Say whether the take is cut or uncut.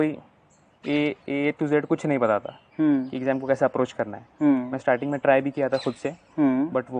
uncut